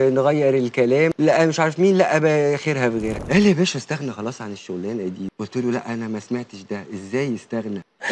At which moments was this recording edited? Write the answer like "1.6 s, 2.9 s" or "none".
3.2 s